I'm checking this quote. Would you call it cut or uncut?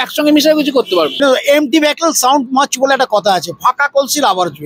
cut